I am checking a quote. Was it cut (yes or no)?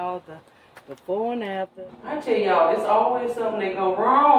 yes